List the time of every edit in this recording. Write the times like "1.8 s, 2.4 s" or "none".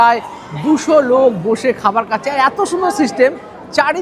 none